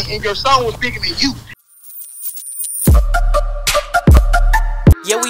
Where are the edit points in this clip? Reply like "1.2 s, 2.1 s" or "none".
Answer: 1.6 s

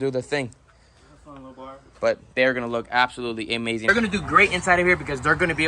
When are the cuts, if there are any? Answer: 3.9 s

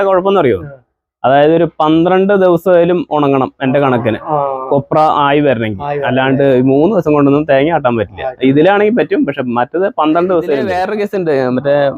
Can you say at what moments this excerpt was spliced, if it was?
10.8 s

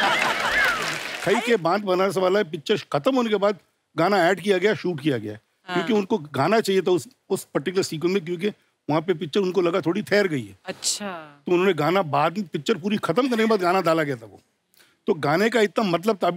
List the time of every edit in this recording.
1.1 s

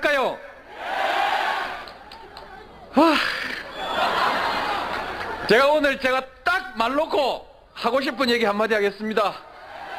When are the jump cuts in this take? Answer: none

